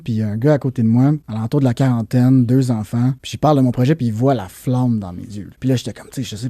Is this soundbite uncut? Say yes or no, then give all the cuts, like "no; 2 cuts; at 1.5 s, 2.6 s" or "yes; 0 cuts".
no; 3 cuts; at 1.3 s, 3.2 s, 5.4 s